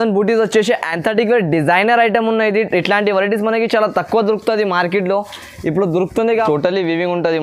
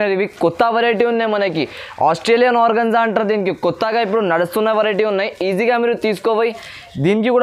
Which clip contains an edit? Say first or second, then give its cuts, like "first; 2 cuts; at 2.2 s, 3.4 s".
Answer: first; 1 cut; at 6.5 s